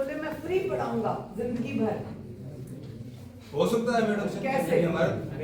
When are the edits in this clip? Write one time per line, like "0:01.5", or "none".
none